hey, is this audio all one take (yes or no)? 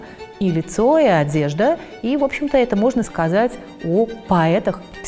yes